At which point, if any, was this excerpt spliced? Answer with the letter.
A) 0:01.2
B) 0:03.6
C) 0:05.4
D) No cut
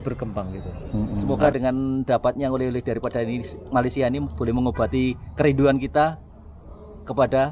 A